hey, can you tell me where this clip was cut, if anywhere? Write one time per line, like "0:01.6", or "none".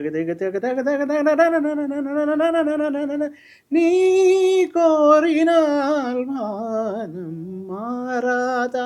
none